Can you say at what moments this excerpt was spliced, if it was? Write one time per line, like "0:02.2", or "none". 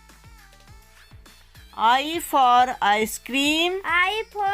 none